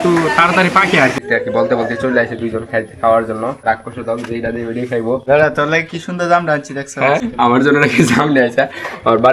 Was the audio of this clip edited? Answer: yes; 4 cuts; at 1.2 s, 3.7 s, 5.2 s, 7.3 s

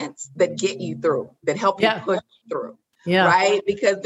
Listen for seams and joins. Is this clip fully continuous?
yes; 0 cuts

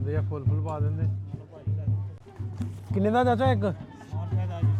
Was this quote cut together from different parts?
no; 0 cuts

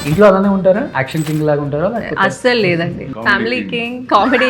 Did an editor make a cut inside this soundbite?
yes; 2 cuts; at 1.0 s, 3.1 s

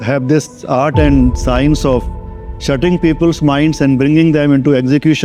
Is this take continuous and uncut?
yes; 0 cuts

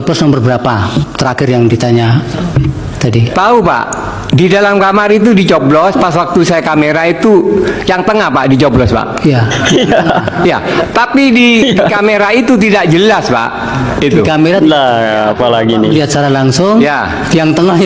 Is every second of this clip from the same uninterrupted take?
yes; 0 cuts

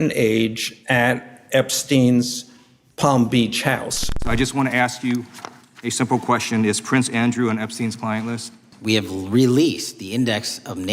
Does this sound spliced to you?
yes; 2 cuts; at 4.1 s, 8.7 s

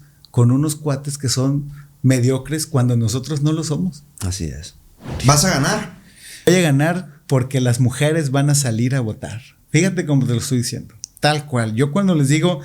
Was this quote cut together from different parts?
yes; 2 cuts; at 5.1 s, 6.5 s

